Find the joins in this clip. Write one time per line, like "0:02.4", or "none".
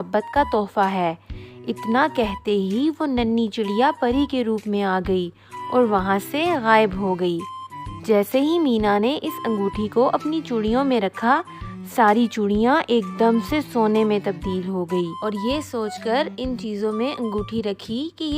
0:15.1